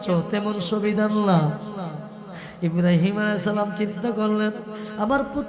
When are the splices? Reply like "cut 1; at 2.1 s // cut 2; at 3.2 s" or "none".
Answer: none